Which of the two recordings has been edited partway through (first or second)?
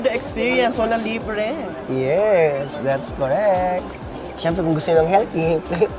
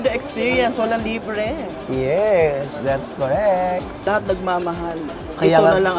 second